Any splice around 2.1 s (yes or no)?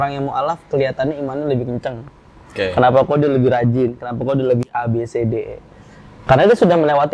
no